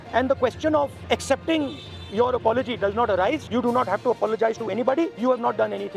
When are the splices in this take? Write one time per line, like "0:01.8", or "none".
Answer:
0:01.0
0:03.4
0:05.1

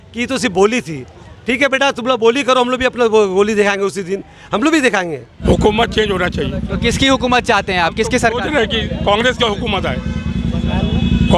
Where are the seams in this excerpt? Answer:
0:05.4

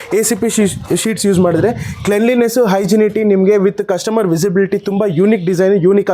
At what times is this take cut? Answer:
none

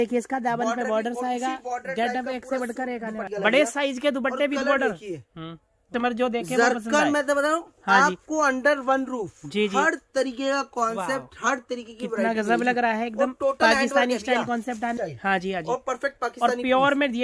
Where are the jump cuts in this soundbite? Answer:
0:03.2
0:05.8
0:15.0

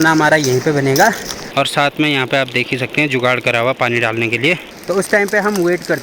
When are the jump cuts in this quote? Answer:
0:01.4
0:04.7

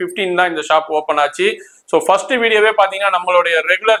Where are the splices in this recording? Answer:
none

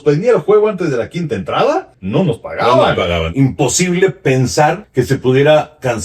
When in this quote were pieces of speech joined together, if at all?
0:02.0
0:03.3
0:04.8

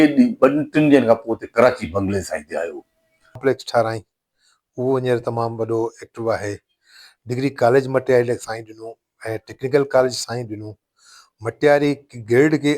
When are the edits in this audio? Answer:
0:03.4

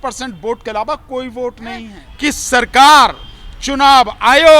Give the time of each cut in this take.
0:02.0

